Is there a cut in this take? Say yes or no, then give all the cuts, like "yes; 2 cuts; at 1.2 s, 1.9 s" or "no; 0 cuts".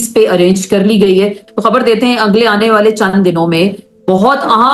yes; 1 cut; at 1.4 s